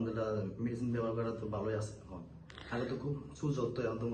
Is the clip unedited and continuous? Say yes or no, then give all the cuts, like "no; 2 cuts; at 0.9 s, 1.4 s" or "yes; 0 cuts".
yes; 0 cuts